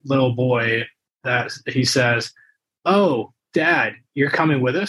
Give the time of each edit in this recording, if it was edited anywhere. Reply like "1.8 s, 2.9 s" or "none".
none